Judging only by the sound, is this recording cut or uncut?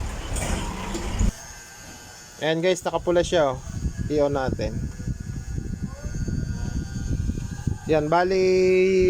cut